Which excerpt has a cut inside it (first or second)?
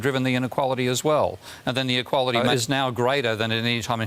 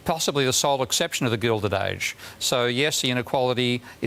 first